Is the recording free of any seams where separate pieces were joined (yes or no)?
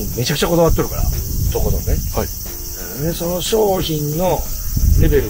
yes